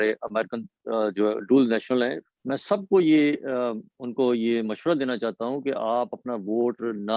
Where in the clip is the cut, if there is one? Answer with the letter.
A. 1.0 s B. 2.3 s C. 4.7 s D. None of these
B